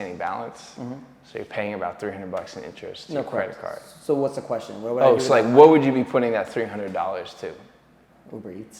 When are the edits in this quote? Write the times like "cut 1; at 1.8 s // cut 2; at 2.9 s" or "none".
none